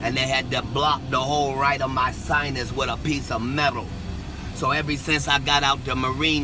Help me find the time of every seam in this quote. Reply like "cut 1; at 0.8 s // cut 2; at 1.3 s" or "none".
none